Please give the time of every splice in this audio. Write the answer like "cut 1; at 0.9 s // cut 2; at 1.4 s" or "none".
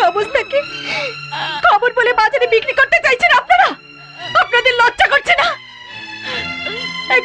none